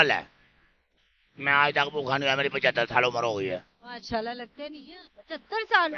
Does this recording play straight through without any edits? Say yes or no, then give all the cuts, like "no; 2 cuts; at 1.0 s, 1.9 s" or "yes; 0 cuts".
yes; 0 cuts